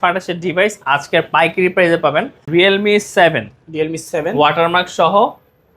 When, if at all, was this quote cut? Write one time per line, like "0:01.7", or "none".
0:02.4